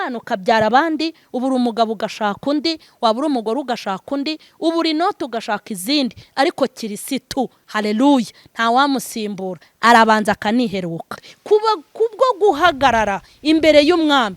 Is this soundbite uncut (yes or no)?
no